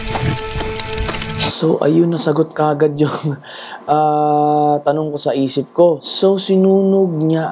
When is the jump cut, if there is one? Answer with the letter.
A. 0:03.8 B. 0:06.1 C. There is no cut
B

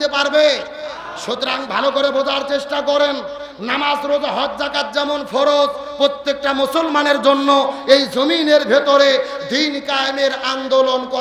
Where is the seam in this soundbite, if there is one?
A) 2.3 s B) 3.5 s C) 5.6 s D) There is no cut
D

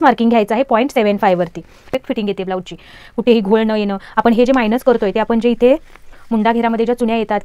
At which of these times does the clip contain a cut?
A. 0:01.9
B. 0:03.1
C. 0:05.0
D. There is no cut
A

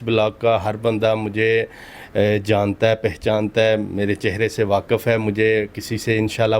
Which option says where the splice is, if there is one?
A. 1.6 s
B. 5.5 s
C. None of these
C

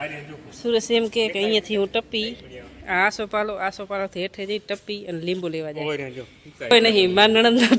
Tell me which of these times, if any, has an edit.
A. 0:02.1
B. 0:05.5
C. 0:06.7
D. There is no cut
C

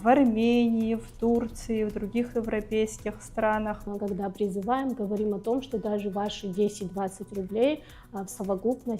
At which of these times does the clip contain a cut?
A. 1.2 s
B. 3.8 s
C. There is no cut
B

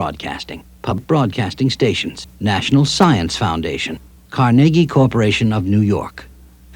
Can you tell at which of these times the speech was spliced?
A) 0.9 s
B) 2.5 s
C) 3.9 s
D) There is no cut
A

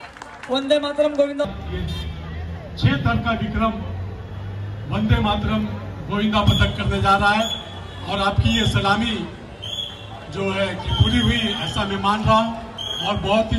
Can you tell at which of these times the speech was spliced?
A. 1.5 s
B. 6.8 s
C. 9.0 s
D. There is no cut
A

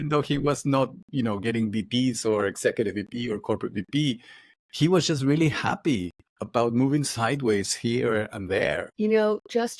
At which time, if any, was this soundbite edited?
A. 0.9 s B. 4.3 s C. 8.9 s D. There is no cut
C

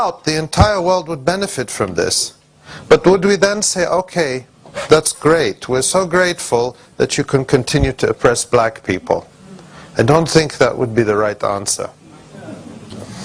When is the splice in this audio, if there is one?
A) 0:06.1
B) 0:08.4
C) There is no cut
A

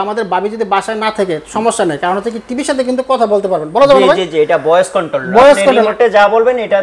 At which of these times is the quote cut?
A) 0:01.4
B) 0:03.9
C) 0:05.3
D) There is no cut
D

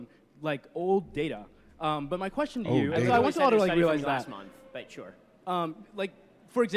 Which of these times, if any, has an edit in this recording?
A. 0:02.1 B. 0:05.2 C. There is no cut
C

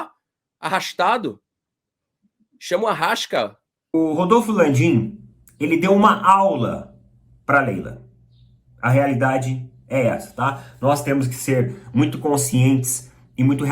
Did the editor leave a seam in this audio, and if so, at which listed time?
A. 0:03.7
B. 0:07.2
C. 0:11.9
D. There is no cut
A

